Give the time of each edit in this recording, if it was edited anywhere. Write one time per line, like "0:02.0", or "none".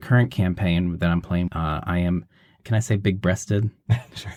none